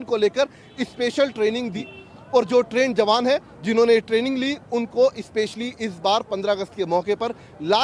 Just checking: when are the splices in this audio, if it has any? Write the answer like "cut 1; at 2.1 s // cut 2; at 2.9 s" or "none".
cut 1; at 1.8 s